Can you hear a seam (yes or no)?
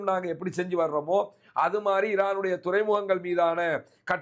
no